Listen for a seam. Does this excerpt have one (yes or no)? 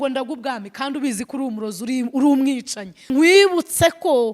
yes